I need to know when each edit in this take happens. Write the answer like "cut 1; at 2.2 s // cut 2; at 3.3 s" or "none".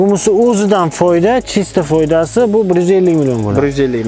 none